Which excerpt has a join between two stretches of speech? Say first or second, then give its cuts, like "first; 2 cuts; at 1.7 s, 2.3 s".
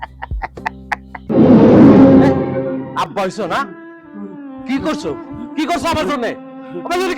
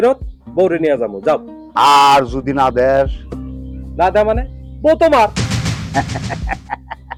first; 2 cuts; at 1.3 s, 2.9 s